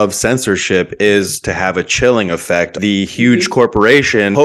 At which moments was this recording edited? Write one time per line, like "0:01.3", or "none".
0:02.7